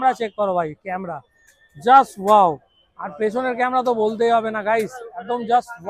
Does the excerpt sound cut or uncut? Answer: uncut